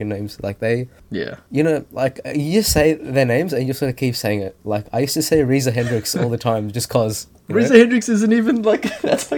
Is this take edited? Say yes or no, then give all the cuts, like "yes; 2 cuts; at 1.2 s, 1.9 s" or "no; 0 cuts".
no; 0 cuts